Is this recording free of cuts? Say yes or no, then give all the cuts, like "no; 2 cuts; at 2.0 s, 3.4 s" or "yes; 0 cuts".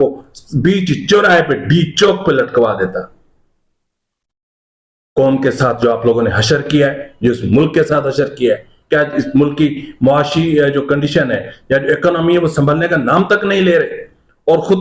yes; 0 cuts